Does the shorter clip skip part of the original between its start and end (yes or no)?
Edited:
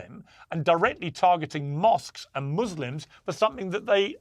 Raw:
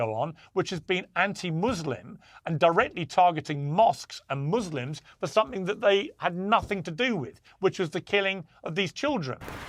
no